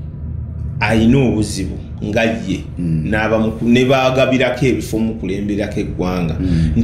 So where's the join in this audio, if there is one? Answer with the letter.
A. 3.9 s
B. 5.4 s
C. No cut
C